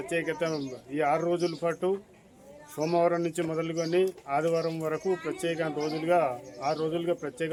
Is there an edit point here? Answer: no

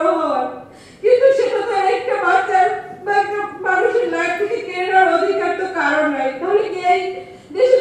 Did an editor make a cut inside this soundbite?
no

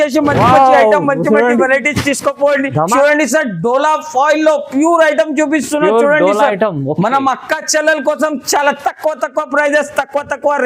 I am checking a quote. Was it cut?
yes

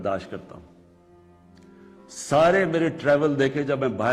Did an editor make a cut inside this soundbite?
no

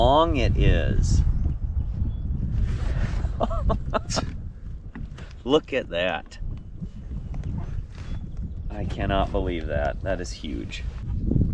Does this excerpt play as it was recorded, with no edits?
yes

